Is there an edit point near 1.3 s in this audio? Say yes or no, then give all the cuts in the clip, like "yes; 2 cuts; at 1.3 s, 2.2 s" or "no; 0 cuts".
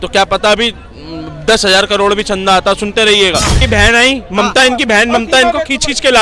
no; 1 cut; at 3.6 s